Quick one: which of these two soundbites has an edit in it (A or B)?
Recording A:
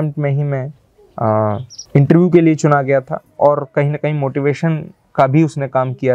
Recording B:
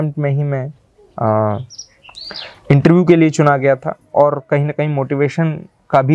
A